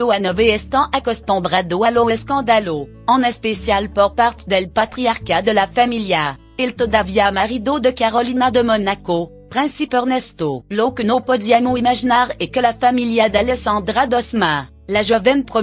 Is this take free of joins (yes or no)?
yes